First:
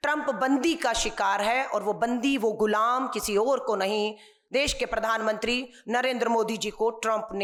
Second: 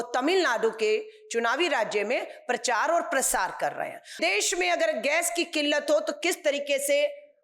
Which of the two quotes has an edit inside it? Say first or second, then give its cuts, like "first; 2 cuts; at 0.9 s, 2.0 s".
second; 1 cut; at 4.2 s